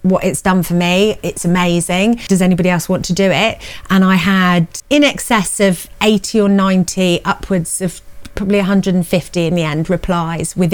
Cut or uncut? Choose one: cut